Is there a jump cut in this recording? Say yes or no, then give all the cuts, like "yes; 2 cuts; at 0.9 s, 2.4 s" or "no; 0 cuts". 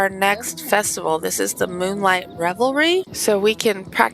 yes; 1 cut; at 3.1 s